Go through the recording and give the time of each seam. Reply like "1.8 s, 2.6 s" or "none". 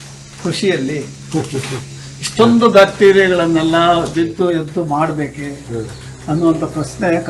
none